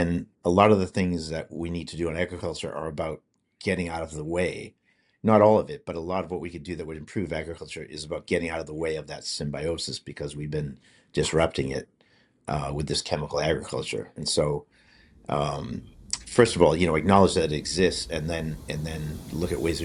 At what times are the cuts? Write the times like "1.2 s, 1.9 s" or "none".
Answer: none